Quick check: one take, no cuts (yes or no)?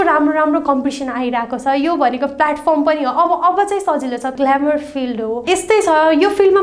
no